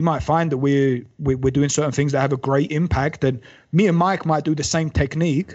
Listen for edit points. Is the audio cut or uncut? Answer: uncut